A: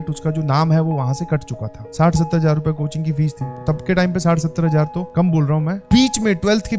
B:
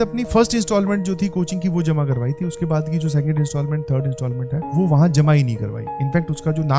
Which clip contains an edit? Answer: A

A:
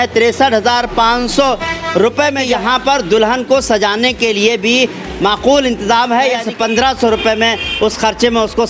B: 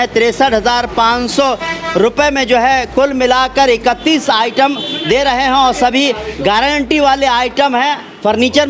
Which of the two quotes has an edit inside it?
A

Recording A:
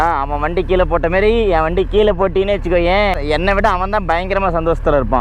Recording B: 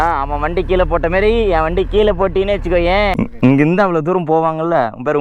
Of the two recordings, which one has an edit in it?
B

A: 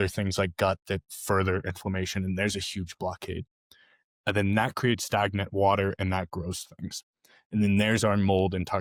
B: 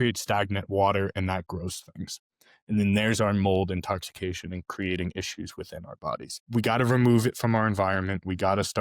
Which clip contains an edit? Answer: B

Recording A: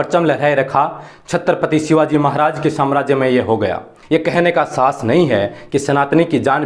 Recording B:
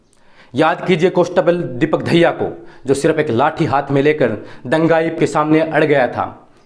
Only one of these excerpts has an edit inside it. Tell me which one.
A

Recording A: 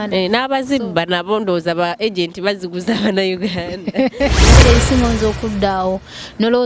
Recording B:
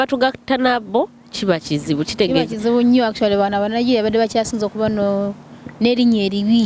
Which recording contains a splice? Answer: A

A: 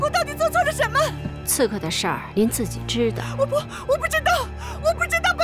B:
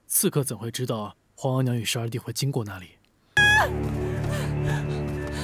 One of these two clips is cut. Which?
B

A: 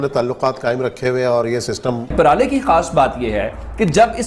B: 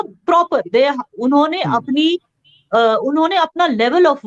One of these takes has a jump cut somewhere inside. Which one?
A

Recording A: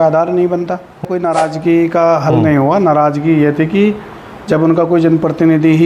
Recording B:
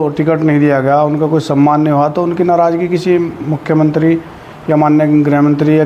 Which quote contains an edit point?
A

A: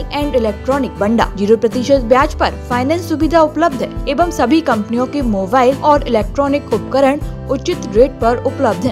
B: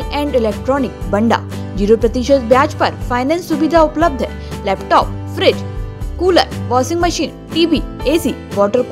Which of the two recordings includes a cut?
A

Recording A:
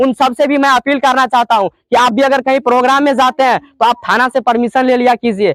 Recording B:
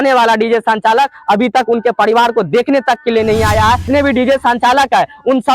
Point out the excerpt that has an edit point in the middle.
B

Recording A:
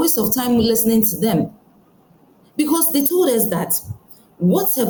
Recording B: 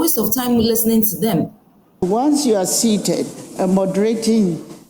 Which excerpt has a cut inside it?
B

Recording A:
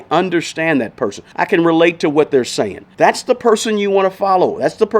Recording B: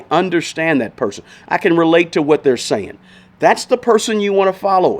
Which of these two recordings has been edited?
A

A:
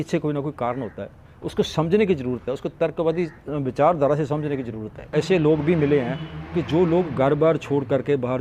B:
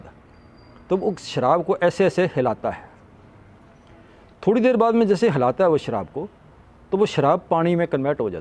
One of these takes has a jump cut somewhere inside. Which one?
A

